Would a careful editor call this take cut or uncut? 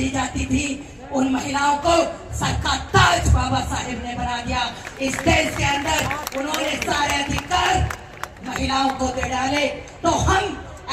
uncut